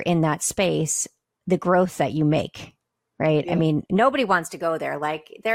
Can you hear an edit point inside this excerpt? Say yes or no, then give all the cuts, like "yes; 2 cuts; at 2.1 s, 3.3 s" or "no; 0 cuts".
no; 0 cuts